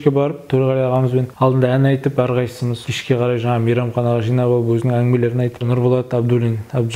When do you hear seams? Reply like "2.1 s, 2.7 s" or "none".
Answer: 1.3 s, 2.7 s, 5.6 s